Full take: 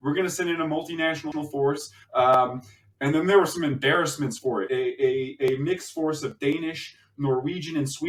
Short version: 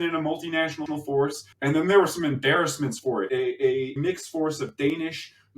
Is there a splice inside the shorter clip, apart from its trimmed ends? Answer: yes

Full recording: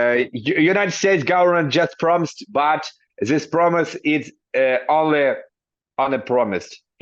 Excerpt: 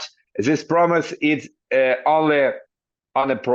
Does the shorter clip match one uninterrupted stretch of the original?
yes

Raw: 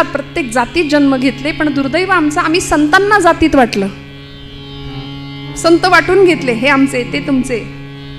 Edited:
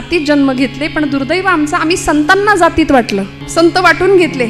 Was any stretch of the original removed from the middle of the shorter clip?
yes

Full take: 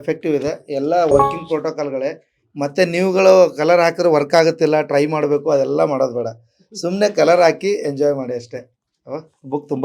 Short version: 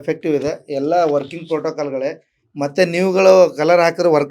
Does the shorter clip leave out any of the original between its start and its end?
no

